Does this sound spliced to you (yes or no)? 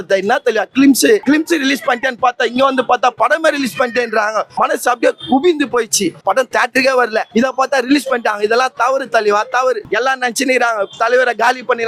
yes